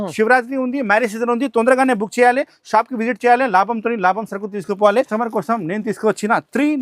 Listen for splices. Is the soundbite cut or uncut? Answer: cut